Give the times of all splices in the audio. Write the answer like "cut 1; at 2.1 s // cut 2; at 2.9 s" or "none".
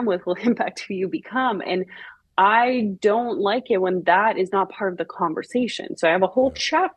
none